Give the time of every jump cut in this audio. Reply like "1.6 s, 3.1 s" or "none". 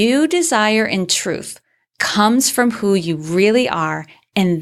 none